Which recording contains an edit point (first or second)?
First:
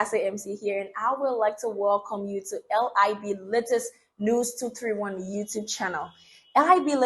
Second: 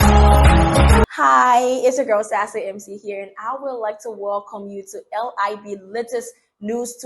second